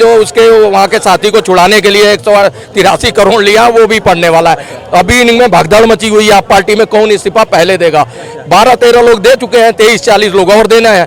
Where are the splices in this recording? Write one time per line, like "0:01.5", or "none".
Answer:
none

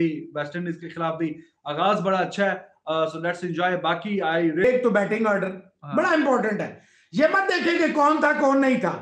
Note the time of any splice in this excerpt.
0:04.6

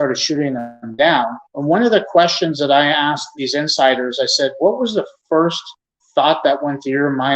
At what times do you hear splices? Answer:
0:01.5
0:03.3

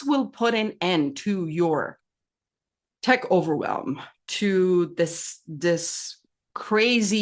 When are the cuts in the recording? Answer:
none

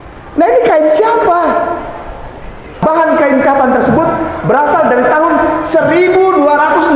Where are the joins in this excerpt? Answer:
0:02.8

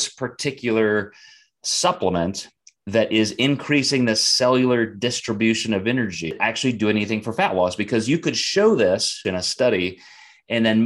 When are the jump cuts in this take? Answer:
0:06.3
0:09.2

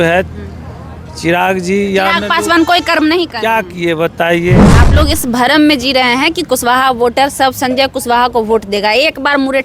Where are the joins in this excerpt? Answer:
0:04.7

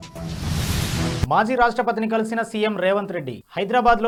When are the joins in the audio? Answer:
none

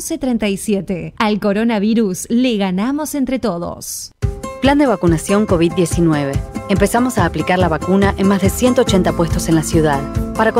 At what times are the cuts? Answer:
0:04.0

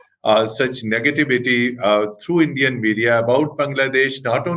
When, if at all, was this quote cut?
none

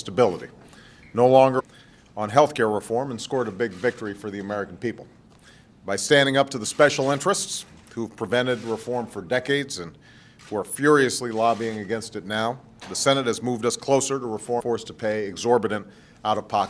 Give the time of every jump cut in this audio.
none

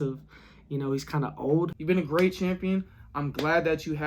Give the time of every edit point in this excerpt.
0:01.8

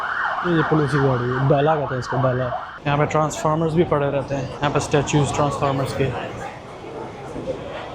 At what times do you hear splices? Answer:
0:02.7

